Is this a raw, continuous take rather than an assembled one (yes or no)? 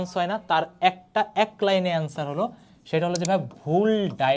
yes